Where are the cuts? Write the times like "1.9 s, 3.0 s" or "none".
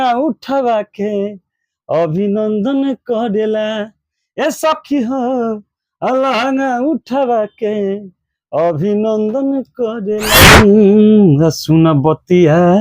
10.6 s